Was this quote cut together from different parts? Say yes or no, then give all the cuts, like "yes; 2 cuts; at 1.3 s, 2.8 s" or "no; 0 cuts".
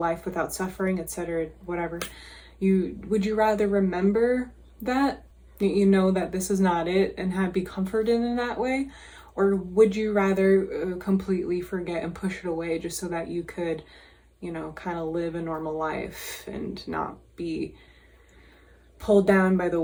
no; 0 cuts